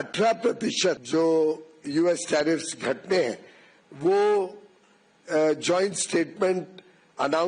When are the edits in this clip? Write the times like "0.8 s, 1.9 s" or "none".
1.0 s

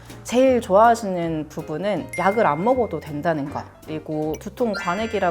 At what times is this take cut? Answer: 4.3 s

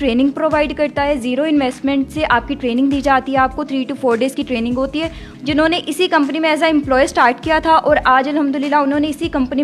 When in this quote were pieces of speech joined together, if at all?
5.3 s

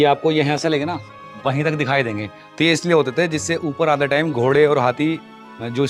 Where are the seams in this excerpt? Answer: none

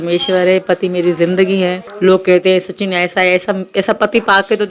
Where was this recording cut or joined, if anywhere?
1.9 s

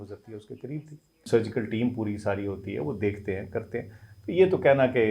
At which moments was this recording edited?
1.2 s

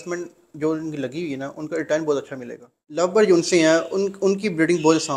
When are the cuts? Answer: 3.0 s

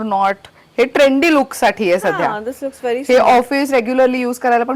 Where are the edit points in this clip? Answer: none

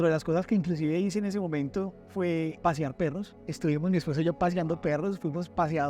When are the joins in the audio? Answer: 2.6 s, 3.4 s

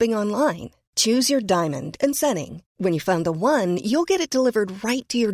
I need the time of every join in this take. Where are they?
none

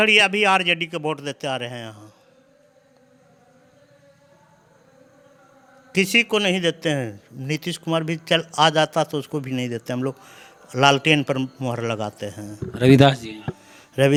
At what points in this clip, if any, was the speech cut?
none

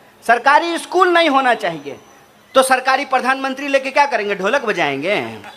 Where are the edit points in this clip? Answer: none

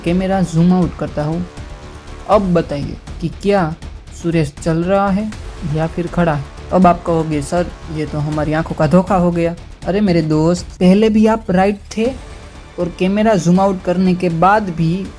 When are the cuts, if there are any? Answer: 10.7 s

